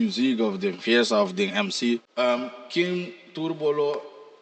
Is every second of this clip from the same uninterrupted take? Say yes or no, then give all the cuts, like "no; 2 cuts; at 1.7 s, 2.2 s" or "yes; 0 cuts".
no; 1 cut; at 2.1 s